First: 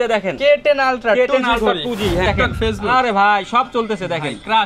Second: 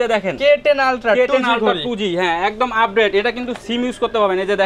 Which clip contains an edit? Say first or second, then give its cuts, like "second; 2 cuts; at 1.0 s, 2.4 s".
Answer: first; 1 cut; at 2.3 s